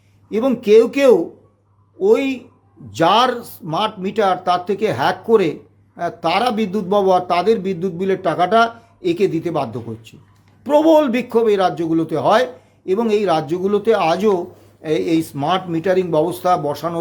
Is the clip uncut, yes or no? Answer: yes